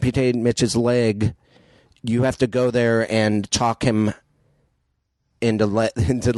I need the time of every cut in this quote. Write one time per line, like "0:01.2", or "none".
none